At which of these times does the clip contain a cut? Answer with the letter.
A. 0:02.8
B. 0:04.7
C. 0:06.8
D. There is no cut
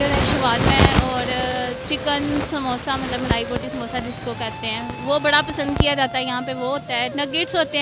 D